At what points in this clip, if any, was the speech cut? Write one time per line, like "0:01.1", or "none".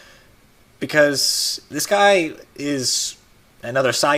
0:01.0